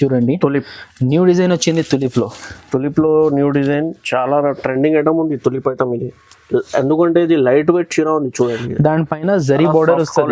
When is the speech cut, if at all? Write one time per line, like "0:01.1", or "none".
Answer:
none